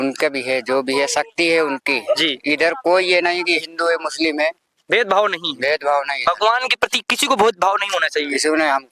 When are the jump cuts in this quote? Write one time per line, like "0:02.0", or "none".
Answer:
none